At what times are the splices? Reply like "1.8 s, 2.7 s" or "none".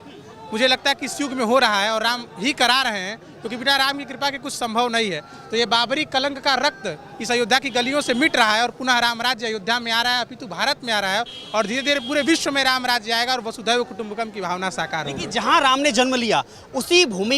none